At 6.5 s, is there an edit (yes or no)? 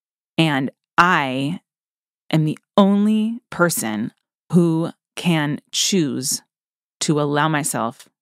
no